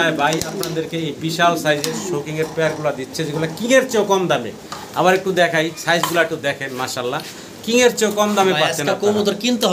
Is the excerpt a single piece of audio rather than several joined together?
yes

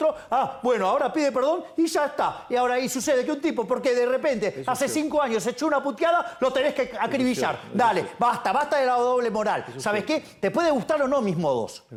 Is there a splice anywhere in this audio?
no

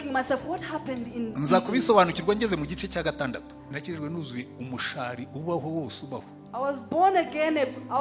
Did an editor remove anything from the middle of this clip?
yes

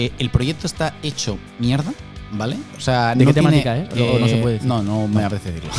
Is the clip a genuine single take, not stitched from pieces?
yes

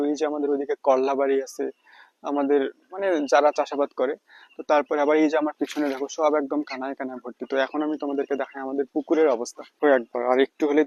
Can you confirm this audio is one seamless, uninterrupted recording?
yes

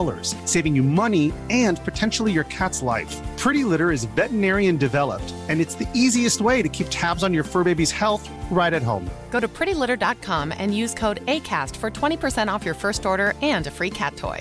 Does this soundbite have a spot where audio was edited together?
no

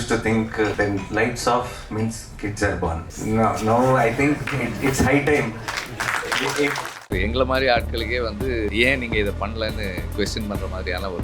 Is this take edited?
yes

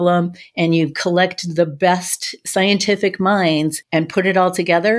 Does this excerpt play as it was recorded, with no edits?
no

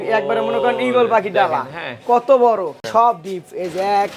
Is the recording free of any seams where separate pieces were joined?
no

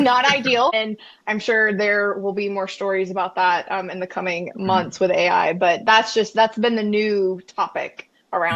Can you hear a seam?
no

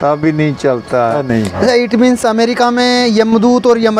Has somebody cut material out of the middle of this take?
yes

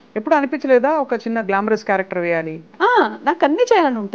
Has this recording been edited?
yes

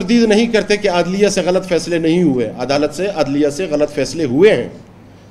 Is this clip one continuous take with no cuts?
yes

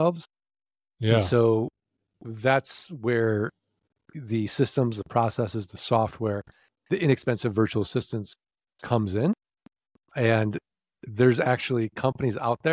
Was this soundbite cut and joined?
no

